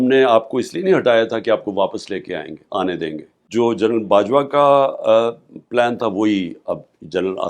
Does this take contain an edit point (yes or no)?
yes